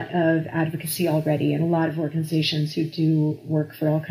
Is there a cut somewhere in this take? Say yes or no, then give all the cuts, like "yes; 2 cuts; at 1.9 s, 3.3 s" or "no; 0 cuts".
no; 0 cuts